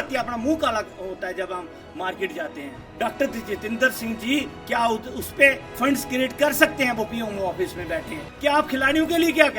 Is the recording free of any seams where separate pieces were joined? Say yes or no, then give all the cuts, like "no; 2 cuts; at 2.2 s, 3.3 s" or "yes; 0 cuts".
no; 2 cuts; at 2.9 s, 8.2 s